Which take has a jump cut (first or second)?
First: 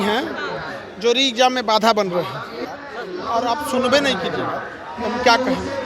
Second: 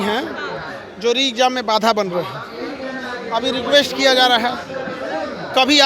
first